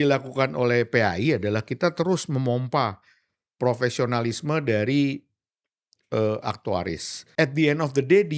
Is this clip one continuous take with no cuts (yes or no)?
no